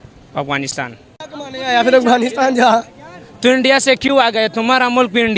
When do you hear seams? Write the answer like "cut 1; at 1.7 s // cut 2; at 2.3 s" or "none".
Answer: cut 1; at 1.2 s